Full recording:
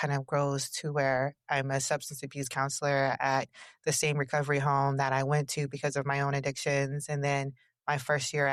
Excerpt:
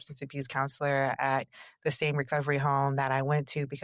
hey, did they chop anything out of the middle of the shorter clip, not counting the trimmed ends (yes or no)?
no